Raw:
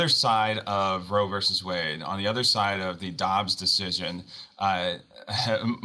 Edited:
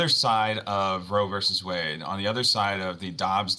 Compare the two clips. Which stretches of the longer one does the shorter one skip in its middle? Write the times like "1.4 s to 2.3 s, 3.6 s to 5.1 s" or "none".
none